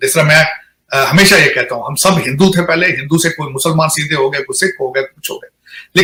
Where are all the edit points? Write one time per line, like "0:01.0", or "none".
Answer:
none